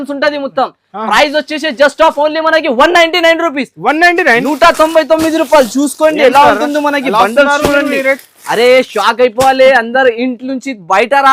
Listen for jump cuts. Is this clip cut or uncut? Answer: uncut